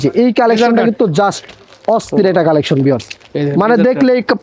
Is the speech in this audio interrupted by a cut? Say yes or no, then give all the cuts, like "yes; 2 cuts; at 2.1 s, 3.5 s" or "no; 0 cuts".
no; 0 cuts